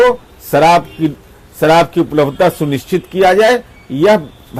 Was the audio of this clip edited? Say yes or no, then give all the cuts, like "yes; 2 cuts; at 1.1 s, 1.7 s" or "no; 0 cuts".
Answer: no; 0 cuts